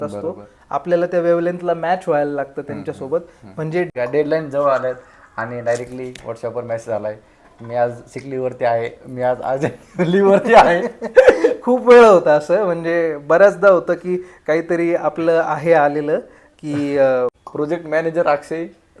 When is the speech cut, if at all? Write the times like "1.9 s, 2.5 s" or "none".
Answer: 3.9 s, 17.4 s